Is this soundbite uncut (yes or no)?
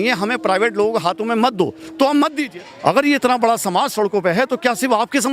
no